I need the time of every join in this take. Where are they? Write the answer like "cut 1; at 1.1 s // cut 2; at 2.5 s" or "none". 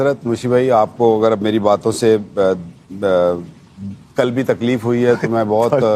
none